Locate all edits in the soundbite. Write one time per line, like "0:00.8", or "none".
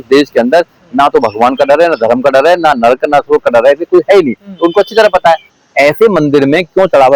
0:05.6

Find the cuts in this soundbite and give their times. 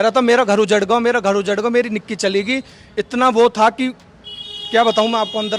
none

